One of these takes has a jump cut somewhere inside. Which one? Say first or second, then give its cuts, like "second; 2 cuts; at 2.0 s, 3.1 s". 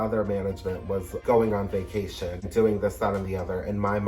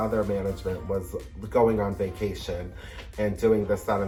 first; 2 cuts; at 1.1 s, 2.5 s